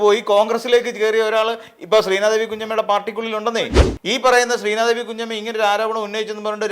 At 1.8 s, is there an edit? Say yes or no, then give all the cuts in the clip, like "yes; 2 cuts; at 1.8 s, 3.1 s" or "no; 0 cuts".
no; 1 cut; at 3.9 s